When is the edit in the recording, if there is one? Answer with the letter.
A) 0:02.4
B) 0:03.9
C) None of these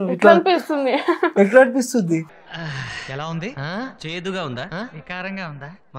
C